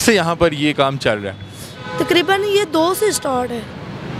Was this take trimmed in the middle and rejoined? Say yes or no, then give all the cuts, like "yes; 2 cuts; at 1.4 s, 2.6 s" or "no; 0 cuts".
no; 0 cuts